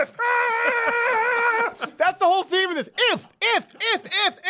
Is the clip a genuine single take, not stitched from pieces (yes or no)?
yes